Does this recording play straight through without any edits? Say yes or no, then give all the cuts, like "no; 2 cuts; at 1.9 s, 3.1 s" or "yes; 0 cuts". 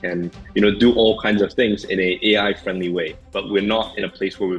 no; 1 cut; at 3.2 s